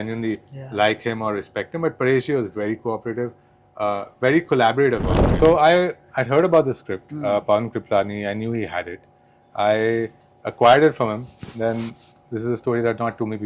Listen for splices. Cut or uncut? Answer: cut